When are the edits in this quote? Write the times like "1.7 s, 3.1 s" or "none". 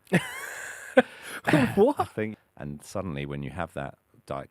2.4 s